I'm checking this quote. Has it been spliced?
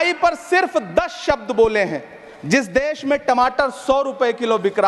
no; 0 cuts

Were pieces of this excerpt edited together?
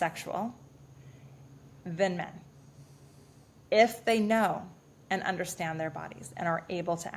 no; 0 cuts

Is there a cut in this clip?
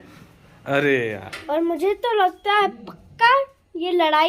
yes; 1 cut; at 1.3 s

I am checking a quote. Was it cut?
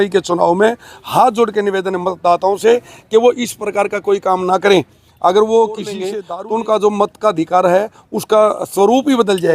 yes; 1 cut; at 6.1 s

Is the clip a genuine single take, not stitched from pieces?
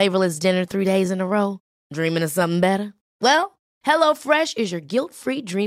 yes; 0 cuts

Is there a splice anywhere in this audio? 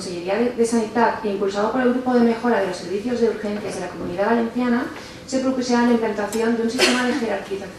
yes; 1 cut; at 5.5 s

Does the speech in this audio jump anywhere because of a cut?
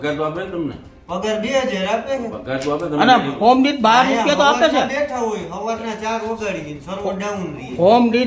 no; 0 cuts

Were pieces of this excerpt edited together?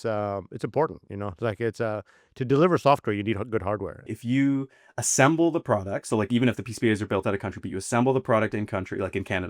yes; 1 cut; at 4.1 s

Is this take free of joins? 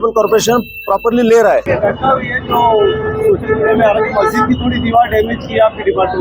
yes; 0 cuts

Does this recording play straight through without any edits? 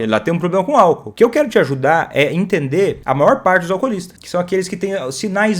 no; 3 cuts; at 1.1 s, 3.0 s, 4.1 s

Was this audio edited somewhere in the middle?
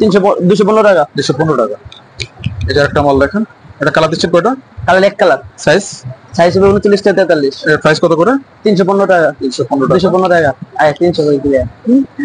no; 0 cuts

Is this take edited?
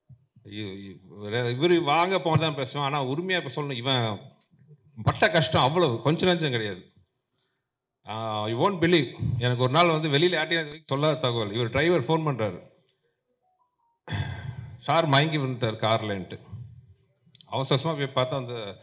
no; 0 cuts

